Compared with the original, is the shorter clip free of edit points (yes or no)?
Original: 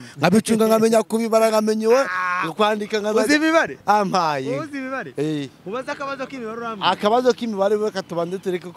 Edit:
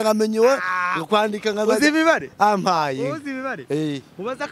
yes